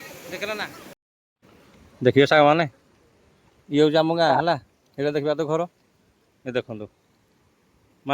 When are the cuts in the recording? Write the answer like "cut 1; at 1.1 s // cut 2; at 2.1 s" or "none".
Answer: cut 1; at 1.1 s